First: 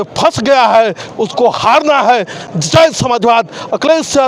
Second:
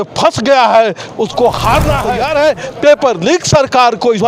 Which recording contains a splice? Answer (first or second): second